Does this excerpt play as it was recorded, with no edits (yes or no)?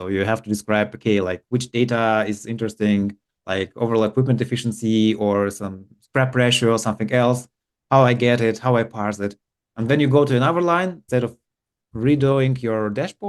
no